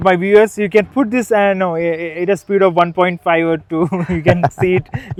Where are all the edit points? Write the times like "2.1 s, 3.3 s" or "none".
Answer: none